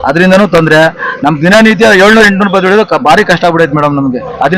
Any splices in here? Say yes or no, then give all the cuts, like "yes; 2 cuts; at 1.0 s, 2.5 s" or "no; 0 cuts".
no; 0 cuts